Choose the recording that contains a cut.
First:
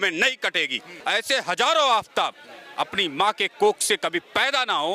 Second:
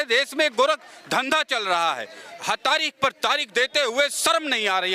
first; 1 cut; at 0.9 s

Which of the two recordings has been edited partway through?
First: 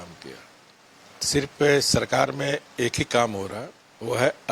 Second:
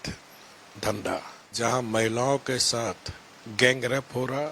second; 1 cut; at 1.4 s

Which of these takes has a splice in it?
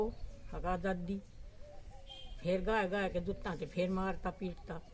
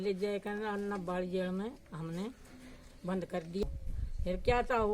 second; 1 cut; at 3.6 s

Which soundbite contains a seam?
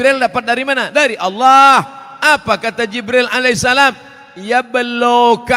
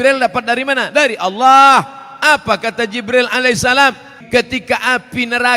second; 1 cut; at 4.1 s

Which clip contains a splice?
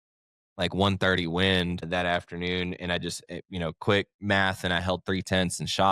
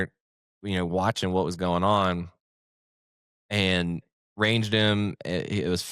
first; 1 cut; at 1.8 s

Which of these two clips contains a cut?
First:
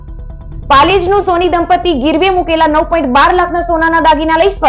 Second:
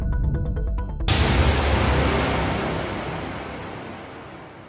second; 1 cut; at 1.1 s

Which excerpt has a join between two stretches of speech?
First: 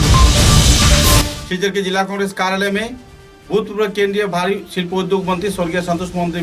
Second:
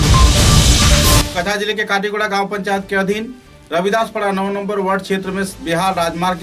first; 1 cut; at 1.3 s

